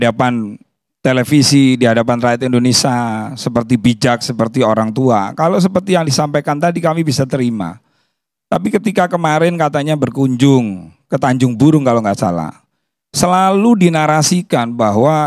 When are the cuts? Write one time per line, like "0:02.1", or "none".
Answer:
none